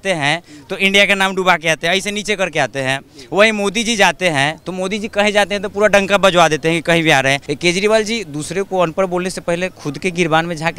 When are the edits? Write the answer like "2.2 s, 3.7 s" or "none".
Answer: 7.5 s